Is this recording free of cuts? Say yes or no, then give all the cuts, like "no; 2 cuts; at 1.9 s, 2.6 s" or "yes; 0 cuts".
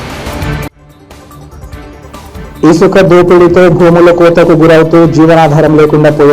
no; 1 cut; at 1.9 s